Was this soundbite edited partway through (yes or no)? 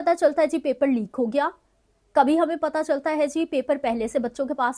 no